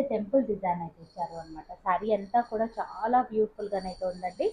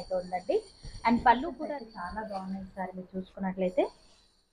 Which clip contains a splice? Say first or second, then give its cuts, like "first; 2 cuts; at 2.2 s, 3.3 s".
second; 1 cut; at 1.5 s